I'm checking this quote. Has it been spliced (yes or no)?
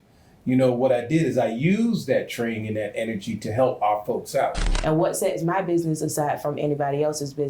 yes